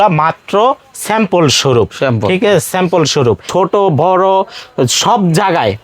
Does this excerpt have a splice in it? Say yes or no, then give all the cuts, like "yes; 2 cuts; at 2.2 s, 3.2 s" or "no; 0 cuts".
yes; 1 cut; at 3.5 s